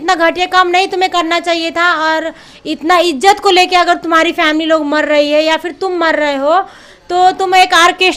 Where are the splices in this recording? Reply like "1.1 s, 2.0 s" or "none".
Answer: none

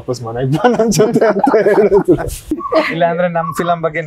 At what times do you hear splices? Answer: 2.5 s

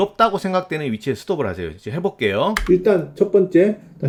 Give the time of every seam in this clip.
none

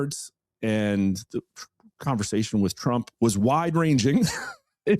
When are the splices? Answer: 3.1 s

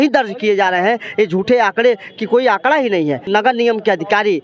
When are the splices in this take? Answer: 3.3 s

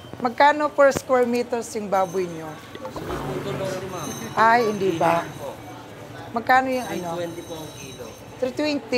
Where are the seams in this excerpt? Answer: none

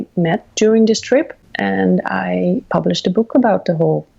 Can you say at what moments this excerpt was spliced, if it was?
1.5 s

